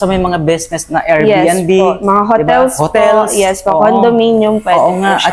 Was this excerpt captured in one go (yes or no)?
yes